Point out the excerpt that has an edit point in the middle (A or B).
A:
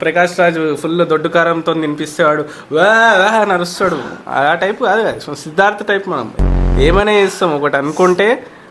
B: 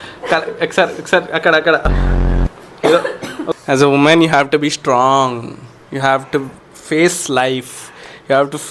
B